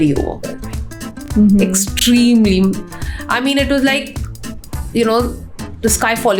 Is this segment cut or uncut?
uncut